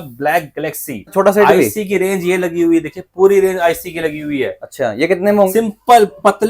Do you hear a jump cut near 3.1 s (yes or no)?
no